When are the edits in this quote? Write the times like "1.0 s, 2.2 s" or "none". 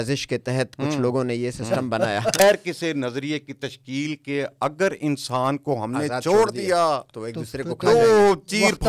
2.4 s